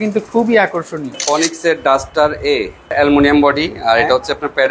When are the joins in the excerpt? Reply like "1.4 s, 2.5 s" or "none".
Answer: 1.2 s, 2.9 s